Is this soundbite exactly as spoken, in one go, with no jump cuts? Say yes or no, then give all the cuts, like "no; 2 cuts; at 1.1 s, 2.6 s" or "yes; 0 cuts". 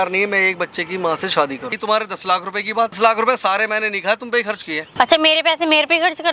no; 3 cuts; at 1.8 s, 3.0 s, 4.9 s